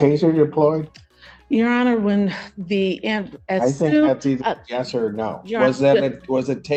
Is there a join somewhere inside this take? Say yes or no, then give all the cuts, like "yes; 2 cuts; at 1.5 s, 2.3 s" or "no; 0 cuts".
no; 0 cuts